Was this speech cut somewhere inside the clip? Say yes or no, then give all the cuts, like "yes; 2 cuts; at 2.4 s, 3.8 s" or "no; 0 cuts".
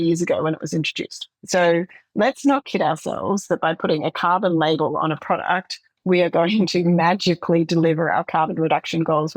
no; 0 cuts